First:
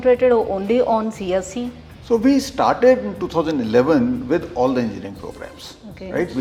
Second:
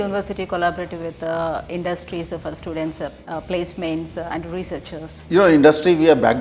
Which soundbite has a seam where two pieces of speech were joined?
second; 1 cut; at 5.1 s

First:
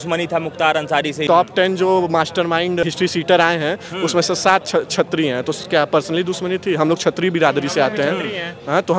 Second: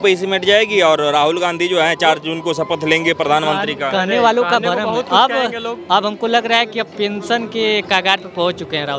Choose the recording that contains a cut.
first; 2 cuts; at 1.2 s, 2.8 s

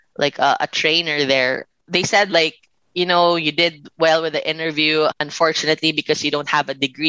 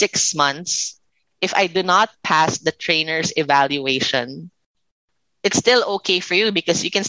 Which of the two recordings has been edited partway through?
first; 2 cuts; at 1.7 s, 5.2 s

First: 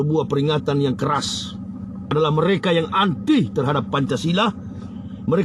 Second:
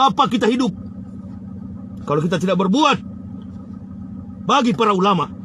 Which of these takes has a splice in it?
first; 1 cut; at 2.0 s

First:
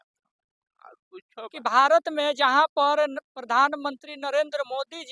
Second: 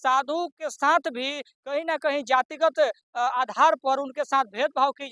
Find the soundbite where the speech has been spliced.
first; 1 cut; at 1.5 s

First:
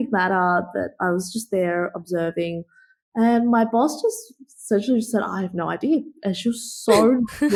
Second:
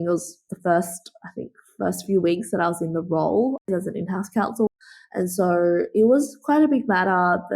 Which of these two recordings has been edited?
second; 2 cuts; at 3.7 s, 4.7 s

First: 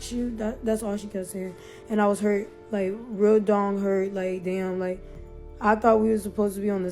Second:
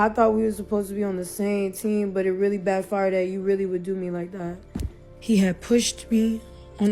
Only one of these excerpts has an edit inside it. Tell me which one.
second; 1 cut; at 5.1 s

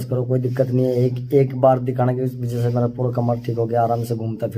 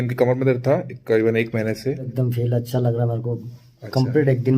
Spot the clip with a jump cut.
second; 1 cut; at 2.1 s

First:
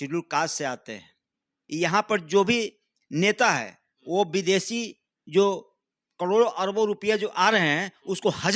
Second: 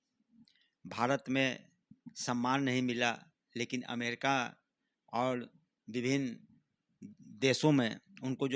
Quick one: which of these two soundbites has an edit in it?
first; 1 cut; at 1.6 s

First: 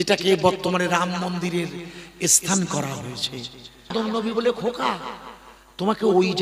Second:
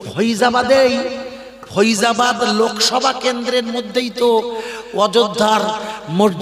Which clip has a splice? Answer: first; 1 cut; at 3.9 s

